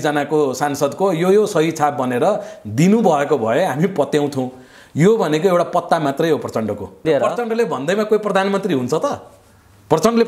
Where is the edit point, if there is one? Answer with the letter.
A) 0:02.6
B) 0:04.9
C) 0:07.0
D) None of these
C